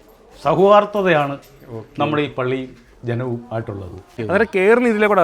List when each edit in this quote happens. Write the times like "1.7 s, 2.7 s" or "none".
4.1 s